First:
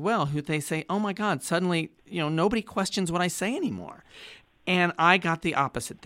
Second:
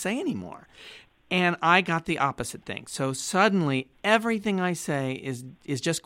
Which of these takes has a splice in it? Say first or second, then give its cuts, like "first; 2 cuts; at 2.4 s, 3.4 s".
first; 1 cut; at 2.0 s